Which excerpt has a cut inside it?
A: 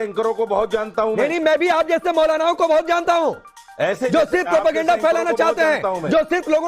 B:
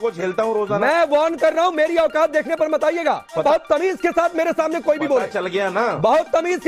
B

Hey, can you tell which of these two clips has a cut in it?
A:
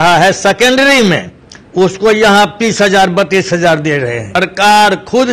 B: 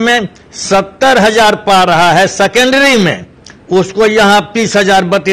A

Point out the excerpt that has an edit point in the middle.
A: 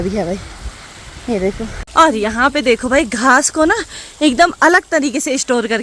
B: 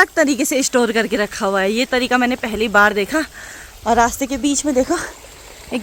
A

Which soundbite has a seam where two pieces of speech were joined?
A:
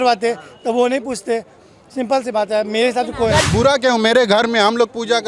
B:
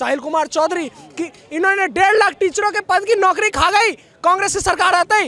A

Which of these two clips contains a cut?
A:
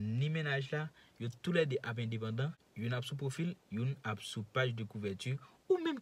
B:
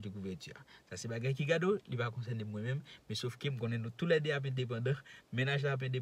A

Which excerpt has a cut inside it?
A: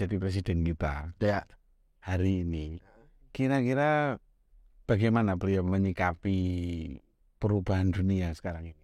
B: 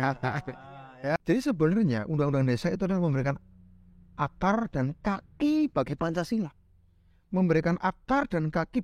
B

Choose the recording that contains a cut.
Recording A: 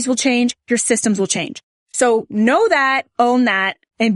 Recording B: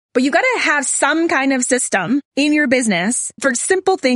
B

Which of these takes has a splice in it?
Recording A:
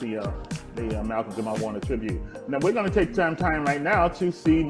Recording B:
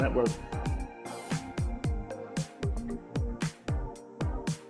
A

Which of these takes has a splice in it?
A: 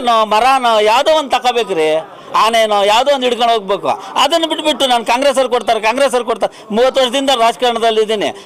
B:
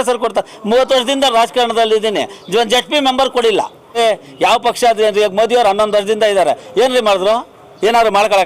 B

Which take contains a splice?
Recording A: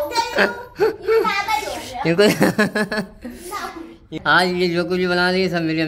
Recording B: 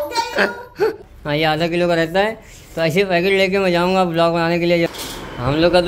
B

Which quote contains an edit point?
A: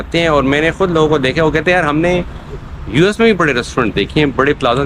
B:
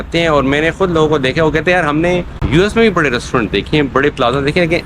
B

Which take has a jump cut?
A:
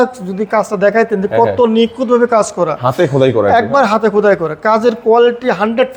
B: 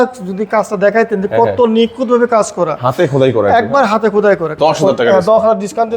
B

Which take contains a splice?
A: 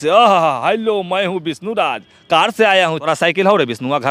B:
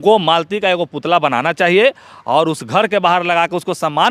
A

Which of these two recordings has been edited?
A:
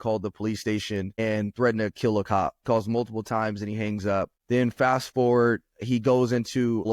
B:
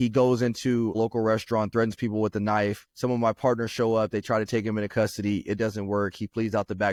A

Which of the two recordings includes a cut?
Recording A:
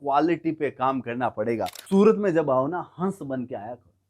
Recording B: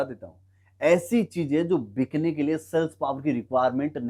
A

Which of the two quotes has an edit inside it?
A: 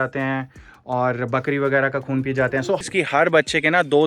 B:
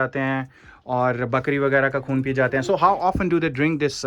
A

